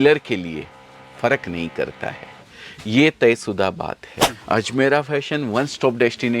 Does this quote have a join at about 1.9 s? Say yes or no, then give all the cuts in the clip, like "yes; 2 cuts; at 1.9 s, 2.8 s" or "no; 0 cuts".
no; 1 cut; at 4.4 s